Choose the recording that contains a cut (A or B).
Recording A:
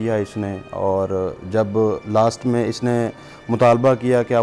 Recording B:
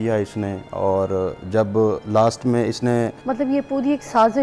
B